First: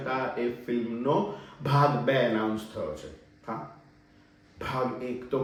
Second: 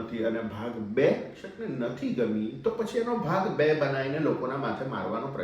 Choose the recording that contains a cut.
second; 1 cut; at 1.4 s

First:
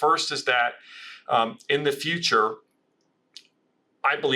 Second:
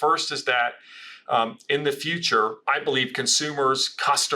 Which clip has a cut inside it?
second; 1 cut; at 2.6 s

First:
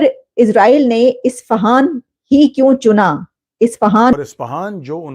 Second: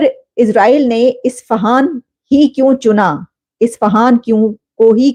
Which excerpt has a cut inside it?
first; 1 cut; at 4.1 s

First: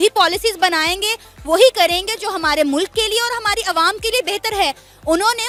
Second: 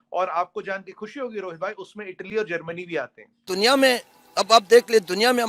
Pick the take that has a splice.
second; 1 cut; at 3.5 s

